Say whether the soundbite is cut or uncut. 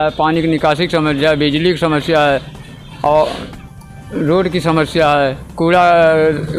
uncut